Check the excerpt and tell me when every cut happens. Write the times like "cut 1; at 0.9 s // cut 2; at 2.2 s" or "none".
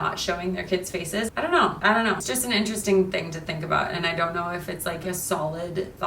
cut 1; at 1.3 s // cut 2; at 2.3 s